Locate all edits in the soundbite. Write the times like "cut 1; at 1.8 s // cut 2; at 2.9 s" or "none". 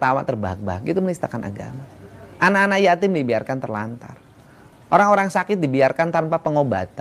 none